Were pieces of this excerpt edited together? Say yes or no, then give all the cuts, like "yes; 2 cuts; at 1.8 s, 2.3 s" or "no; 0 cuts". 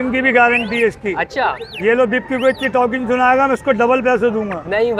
no; 0 cuts